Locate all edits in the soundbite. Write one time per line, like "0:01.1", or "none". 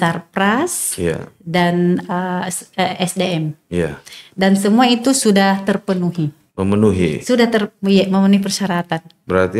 none